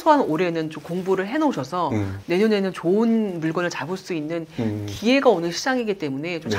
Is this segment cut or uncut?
uncut